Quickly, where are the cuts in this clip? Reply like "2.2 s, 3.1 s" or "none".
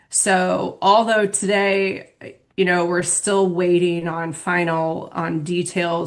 none